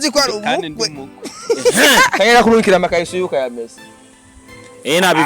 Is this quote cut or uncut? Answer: cut